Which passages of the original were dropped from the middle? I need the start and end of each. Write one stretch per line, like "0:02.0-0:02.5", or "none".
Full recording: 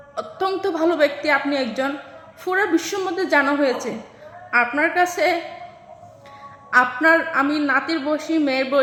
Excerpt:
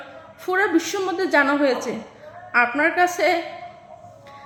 none